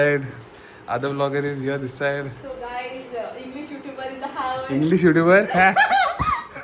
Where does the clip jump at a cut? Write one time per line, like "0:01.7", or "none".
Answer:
none

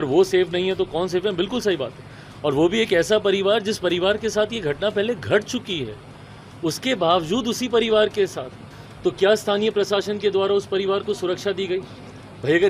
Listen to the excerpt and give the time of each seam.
none

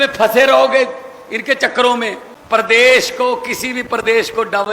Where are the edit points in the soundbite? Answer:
0:02.3

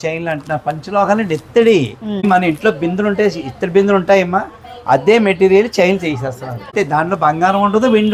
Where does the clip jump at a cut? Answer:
0:02.2
0:06.7

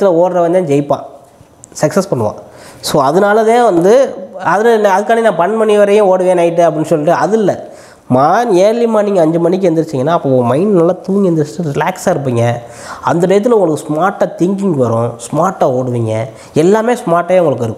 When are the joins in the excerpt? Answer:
none

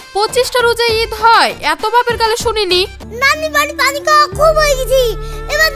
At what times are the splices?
0:03.0

